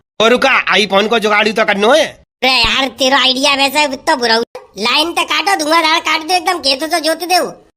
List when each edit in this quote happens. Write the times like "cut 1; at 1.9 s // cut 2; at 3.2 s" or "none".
cut 1; at 4.5 s